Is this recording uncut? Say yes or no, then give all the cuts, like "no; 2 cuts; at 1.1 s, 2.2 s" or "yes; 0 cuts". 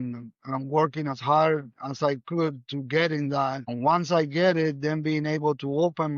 no; 1 cut; at 3.6 s